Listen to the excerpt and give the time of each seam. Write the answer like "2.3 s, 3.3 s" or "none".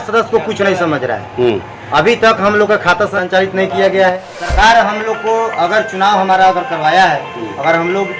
3.2 s, 4.3 s